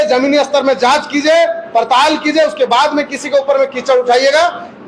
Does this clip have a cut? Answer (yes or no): no